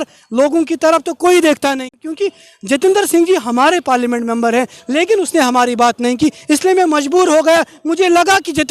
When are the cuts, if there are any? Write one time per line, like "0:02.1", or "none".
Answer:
0:01.9